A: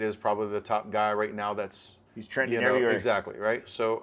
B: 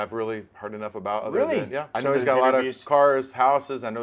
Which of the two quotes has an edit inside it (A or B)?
B